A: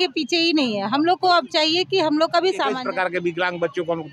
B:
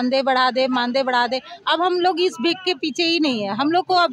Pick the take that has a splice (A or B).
A